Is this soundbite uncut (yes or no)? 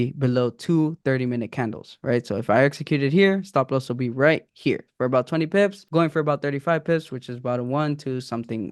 no